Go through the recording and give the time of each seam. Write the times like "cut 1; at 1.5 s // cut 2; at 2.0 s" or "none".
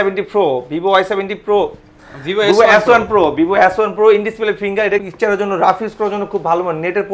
cut 1; at 5.0 s

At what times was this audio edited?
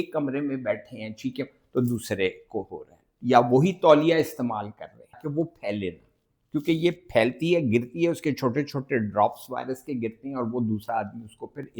cut 1; at 5.2 s

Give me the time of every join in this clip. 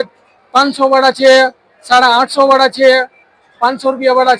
none

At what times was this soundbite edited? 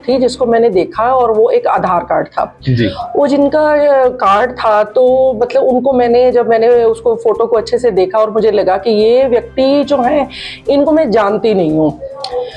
none

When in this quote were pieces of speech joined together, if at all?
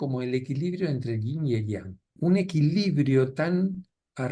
cut 1; at 2.1 s

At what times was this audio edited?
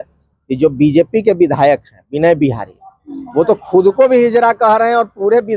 none

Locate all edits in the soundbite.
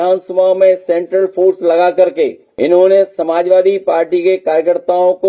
cut 1; at 2.4 s

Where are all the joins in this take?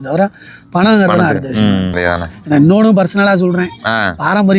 cut 1; at 1.9 s

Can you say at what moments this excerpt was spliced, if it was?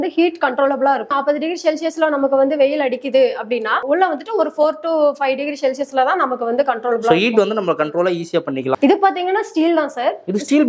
cut 1; at 1.1 s // cut 2; at 3.8 s // cut 3; at 8.8 s

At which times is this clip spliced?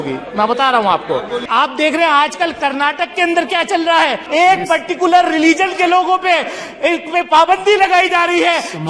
cut 1; at 1.4 s // cut 2; at 4.2 s

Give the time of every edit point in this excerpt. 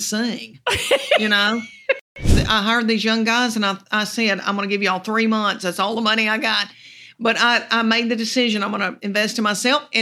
cut 1; at 2.3 s

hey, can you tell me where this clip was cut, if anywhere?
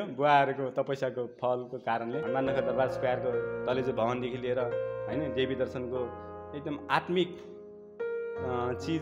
cut 1; at 2.2 s

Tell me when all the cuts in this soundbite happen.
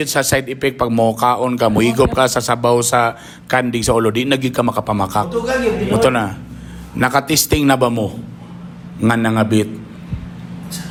none

